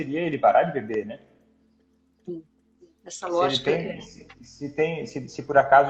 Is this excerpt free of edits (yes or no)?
yes